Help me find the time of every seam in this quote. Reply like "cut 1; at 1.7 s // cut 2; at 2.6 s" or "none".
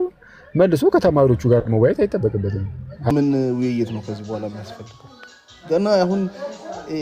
cut 1; at 3.1 s